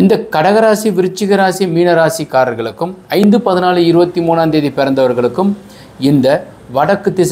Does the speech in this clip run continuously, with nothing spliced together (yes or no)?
yes